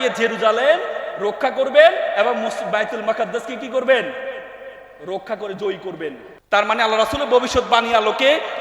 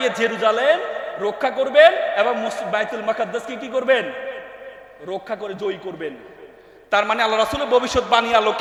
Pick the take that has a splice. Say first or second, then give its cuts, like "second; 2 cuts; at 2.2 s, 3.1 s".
first; 1 cut; at 6.3 s